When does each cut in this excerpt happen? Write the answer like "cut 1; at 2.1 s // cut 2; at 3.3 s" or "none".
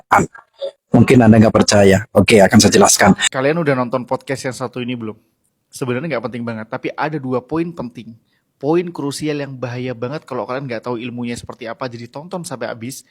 cut 1; at 3.3 s